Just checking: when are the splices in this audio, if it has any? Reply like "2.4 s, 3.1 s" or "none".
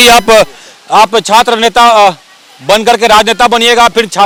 none